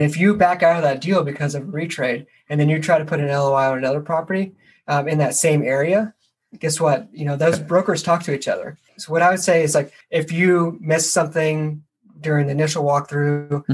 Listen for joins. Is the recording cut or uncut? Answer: cut